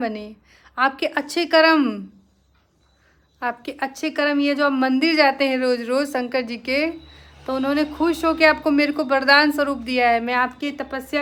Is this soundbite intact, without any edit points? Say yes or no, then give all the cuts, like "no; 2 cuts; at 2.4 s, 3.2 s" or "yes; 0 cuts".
yes; 0 cuts